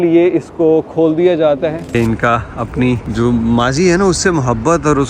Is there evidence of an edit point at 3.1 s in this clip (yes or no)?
yes